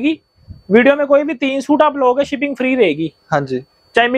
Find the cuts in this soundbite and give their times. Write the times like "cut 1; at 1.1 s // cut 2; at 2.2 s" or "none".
none